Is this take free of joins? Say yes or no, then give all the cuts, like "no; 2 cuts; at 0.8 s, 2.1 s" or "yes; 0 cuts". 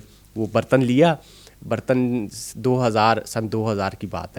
yes; 0 cuts